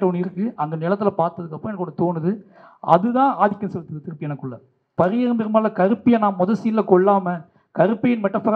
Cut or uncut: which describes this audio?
cut